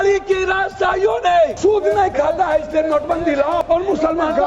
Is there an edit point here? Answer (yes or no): yes